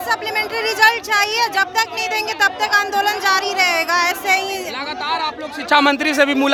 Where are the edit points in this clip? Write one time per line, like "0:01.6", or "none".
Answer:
none